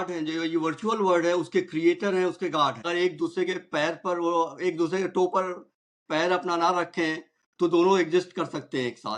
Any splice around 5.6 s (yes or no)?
no